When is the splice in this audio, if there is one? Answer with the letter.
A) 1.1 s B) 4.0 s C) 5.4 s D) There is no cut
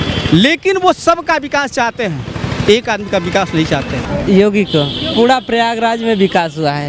B